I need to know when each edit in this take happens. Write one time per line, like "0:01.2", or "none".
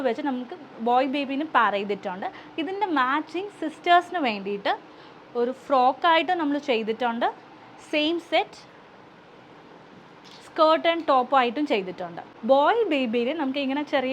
0:12.3